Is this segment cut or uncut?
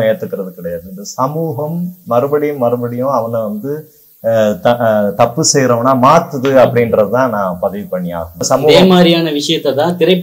cut